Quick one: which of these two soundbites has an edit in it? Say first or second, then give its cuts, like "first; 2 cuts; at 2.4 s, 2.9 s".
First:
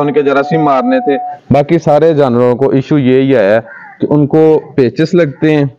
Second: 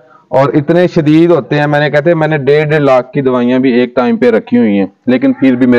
first; 1 cut; at 1.1 s